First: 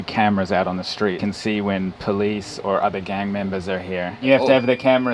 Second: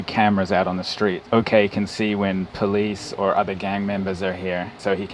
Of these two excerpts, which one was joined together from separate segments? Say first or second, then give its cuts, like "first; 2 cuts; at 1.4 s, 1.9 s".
first; 2 cuts; at 1.2 s, 4.2 s